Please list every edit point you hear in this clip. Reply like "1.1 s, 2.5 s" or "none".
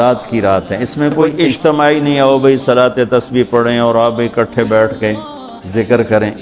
1.4 s